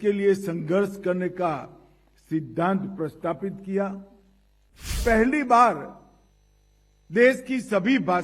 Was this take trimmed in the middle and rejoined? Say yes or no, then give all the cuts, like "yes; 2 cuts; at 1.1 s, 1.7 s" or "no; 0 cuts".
yes; 1 cut; at 5.0 s